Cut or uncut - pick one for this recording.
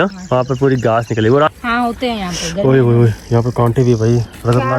cut